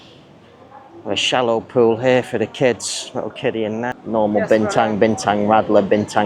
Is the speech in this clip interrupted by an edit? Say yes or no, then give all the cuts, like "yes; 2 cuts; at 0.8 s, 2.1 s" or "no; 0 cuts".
yes; 1 cut; at 3.9 s